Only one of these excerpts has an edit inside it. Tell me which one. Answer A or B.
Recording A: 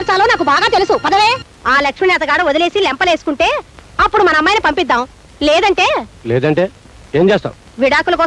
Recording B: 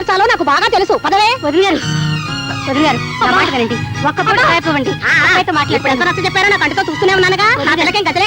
A